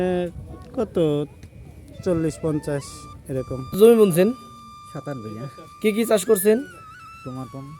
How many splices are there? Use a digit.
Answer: 1